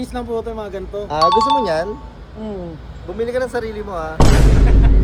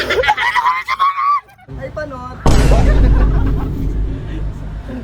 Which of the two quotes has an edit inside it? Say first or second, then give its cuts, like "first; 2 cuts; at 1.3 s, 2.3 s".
second; 1 cut; at 1.7 s